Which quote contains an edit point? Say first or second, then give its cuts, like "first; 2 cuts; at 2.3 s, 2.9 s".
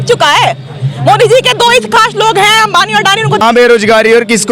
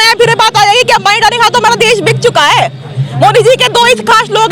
first; 1 cut; at 3.4 s